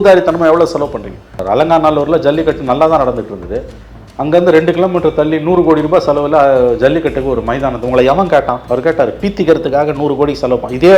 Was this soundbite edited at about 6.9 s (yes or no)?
no